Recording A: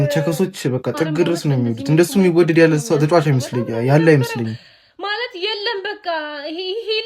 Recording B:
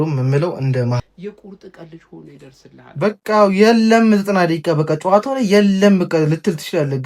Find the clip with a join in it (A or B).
B